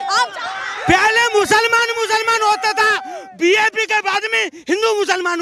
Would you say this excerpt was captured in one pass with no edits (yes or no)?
yes